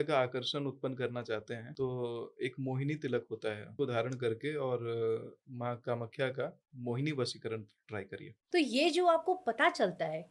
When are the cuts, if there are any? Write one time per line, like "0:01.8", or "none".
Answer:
0:01.7
0:03.7
0:08.3